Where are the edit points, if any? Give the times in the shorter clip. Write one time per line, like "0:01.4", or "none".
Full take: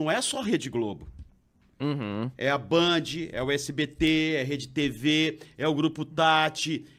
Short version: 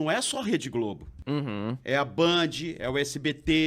0:01.1